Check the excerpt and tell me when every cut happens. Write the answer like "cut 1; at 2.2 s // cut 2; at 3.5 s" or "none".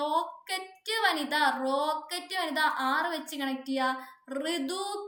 none